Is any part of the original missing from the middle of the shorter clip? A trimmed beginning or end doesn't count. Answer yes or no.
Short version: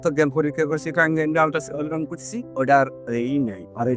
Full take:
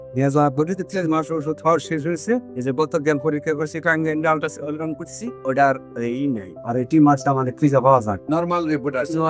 no